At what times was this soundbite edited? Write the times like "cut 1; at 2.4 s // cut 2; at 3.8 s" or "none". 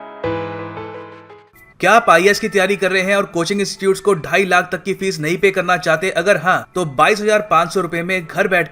cut 1; at 1.2 s